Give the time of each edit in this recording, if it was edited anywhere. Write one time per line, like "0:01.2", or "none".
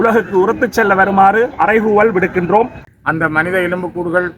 0:02.8